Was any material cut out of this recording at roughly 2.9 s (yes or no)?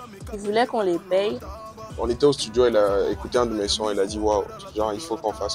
no